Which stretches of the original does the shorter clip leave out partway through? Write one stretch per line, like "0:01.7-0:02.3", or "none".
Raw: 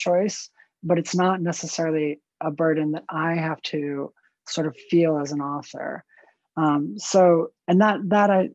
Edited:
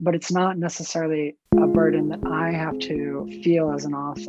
0:04.2-0:04.8